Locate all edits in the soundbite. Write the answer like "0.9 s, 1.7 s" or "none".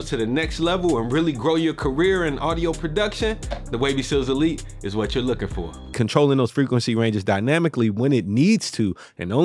5.9 s